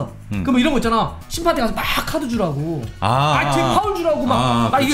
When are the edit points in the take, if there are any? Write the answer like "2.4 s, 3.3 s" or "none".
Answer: none